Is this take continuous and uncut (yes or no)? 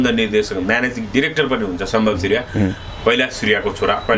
yes